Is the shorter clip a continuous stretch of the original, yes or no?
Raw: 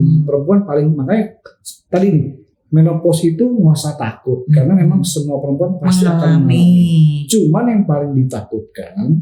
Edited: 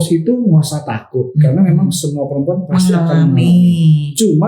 yes